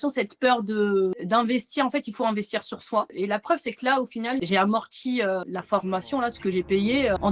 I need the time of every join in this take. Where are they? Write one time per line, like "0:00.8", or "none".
none